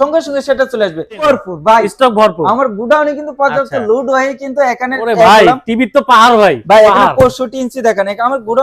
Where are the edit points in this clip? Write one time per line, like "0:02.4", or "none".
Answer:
0:01.3